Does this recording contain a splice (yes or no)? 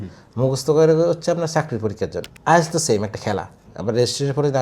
yes